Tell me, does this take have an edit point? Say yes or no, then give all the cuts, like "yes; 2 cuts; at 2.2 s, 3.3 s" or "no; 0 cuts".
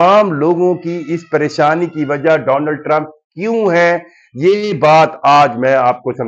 no; 0 cuts